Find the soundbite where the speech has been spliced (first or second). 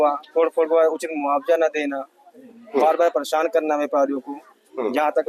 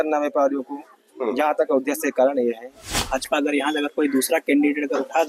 second